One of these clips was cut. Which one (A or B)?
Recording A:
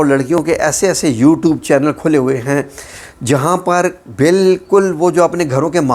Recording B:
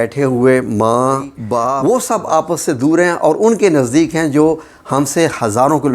B